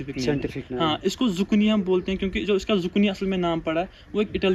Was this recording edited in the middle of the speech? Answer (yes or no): no